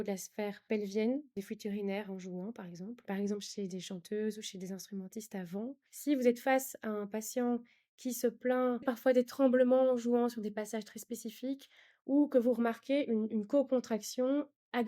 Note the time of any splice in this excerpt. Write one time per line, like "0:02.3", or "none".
0:01.4
0:03.0
0:05.9
0:08.8